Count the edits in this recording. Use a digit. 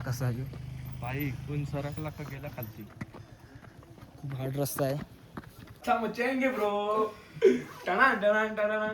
1